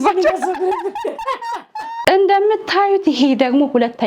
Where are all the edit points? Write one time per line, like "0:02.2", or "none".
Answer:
0:01.9

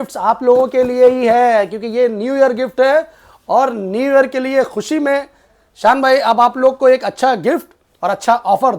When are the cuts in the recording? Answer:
none

